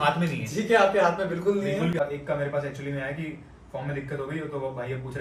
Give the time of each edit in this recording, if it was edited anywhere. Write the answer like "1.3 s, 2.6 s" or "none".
2.0 s